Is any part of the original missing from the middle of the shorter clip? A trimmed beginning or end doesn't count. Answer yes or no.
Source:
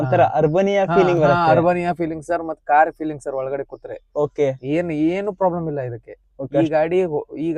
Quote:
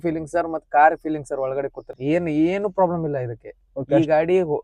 yes